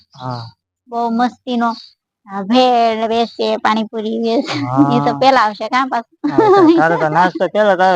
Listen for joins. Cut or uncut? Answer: uncut